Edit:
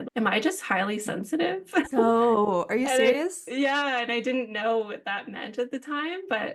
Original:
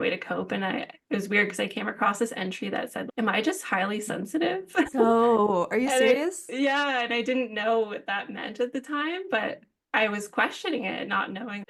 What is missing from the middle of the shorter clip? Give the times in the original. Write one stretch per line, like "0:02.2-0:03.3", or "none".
none